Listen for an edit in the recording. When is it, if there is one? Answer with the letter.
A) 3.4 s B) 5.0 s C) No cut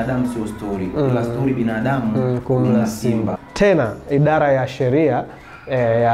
A